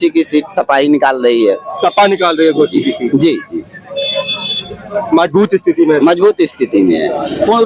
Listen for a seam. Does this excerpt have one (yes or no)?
no